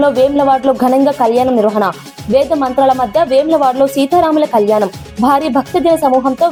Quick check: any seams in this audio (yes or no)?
no